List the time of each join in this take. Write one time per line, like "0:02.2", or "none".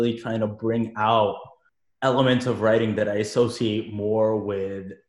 none